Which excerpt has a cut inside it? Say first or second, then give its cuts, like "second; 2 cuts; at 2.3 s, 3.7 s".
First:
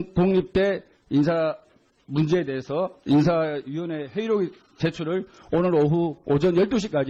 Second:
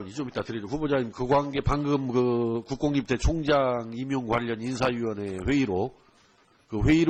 first; 1 cut; at 2.8 s